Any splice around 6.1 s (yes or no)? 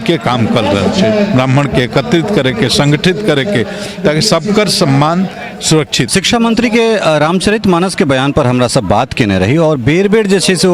yes